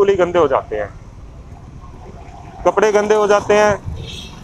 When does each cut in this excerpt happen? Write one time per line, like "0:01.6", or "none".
none